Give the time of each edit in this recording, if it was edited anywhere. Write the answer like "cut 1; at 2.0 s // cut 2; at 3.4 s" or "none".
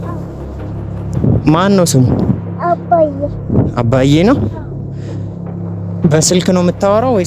none